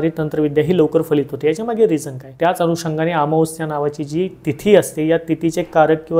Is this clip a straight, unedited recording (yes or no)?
no